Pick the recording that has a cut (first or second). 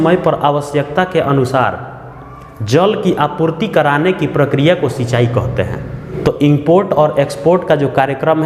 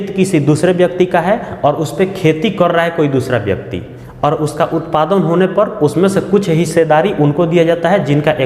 first